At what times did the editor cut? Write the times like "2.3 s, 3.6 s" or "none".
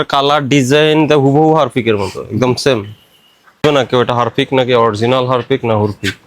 3.6 s